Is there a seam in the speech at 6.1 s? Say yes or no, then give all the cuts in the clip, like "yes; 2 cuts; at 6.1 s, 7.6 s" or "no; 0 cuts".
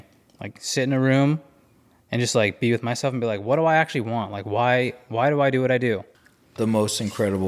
yes; 1 cut; at 6.1 s